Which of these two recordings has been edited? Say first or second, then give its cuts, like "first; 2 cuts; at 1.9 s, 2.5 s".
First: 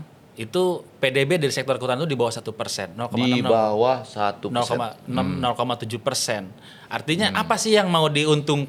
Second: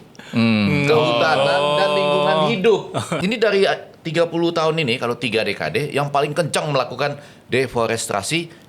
second; 1 cut; at 3.1 s